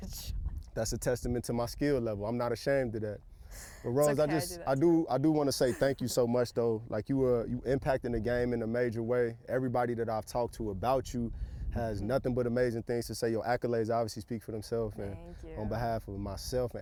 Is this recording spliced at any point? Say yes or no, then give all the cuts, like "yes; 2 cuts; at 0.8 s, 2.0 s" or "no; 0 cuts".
no; 0 cuts